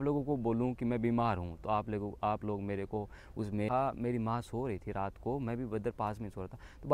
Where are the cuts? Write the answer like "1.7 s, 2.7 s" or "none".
3.7 s